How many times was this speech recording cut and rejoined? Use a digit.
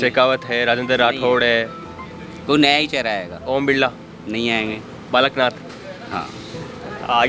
0